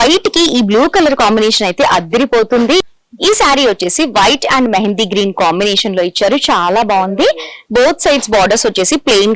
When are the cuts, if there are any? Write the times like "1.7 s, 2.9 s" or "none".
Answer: 2.8 s

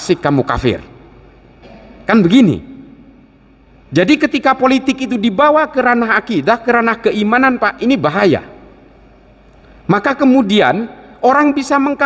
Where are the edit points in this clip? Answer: none

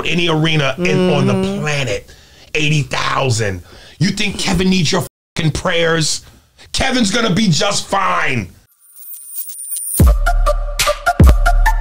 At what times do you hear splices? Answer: 8.9 s

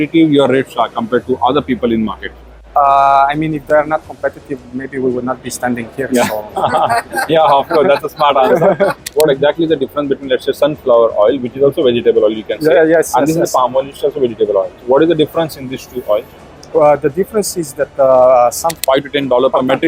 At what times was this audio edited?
9.1 s, 18.8 s

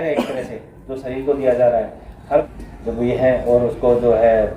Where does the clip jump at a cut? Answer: 2.5 s

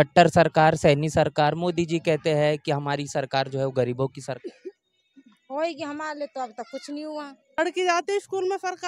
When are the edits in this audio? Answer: 7.6 s

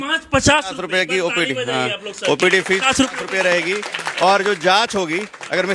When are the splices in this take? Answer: none

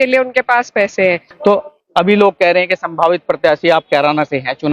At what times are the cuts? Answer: 1.3 s

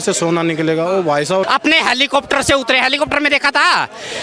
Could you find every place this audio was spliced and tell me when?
1.4 s

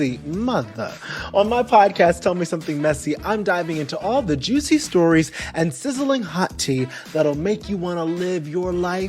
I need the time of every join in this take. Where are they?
none

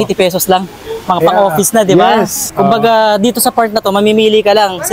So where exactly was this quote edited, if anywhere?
none

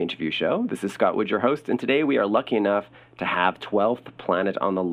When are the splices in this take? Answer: none

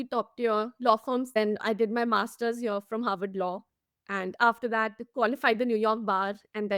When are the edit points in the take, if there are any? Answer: 1.3 s

